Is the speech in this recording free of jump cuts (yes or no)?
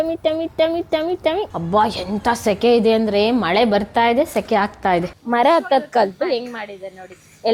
no